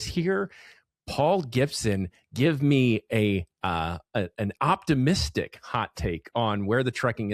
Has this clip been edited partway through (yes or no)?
no